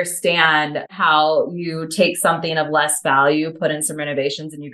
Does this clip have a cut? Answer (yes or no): yes